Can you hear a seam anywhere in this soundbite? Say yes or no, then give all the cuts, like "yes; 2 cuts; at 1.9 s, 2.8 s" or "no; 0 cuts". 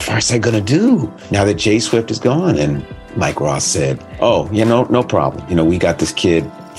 yes; 4 cuts; at 1.2 s, 3.0 s, 4.1 s, 5.4 s